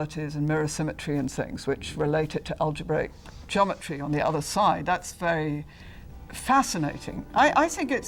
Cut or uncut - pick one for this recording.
uncut